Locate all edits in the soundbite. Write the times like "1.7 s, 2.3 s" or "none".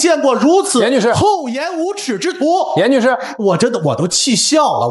none